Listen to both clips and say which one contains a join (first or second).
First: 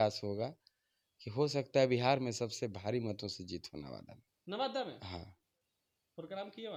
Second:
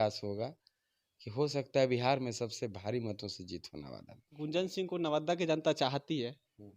second